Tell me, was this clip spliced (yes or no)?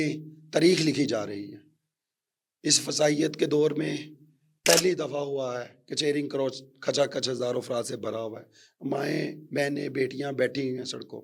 no